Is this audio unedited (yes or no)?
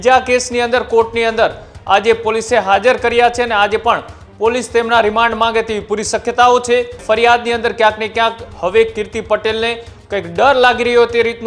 no